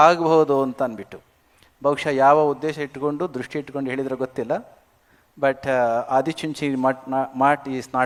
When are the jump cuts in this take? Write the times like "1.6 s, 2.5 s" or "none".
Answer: none